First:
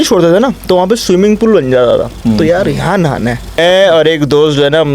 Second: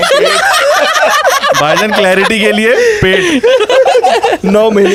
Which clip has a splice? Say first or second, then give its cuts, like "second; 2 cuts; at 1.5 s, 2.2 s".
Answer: first; 1 cut; at 3.6 s